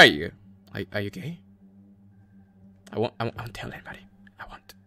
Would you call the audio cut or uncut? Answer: uncut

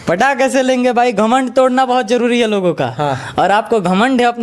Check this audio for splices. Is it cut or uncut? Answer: uncut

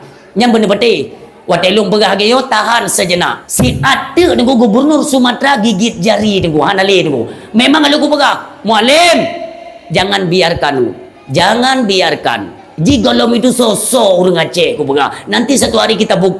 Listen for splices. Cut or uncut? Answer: cut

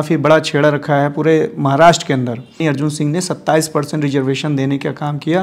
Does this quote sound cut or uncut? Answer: cut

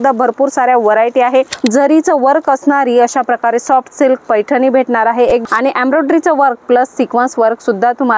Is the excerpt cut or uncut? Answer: cut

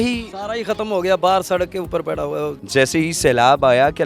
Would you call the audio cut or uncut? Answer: cut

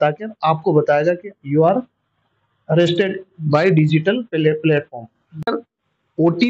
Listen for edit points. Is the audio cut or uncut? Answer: cut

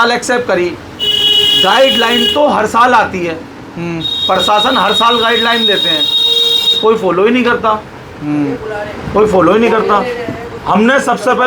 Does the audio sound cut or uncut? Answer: uncut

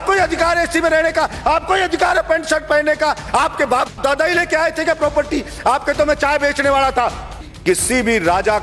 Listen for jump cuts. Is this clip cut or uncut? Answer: cut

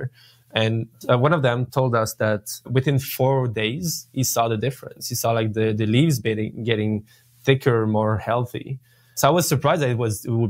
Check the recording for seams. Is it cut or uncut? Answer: uncut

